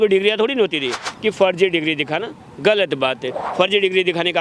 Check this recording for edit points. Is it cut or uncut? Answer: cut